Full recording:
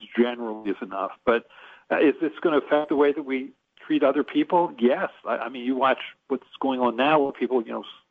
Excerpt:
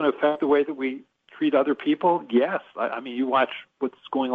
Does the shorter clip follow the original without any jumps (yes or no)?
yes